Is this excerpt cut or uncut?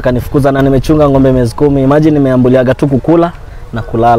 uncut